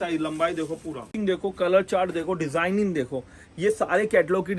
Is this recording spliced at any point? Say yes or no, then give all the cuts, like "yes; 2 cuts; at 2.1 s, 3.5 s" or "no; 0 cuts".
yes; 1 cut; at 1.1 s